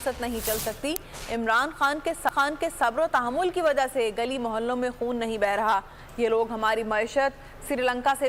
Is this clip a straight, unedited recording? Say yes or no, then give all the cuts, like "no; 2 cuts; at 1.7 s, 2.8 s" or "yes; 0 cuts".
yes; 0 cuts